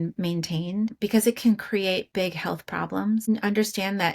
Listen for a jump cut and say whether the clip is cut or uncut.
cut